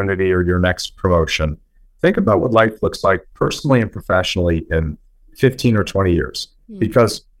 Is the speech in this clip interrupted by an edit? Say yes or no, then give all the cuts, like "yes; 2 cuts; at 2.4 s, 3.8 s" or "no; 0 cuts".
no; 0 cuts